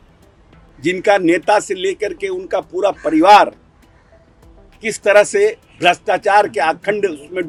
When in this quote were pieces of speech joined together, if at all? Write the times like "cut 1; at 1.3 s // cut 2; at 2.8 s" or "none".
none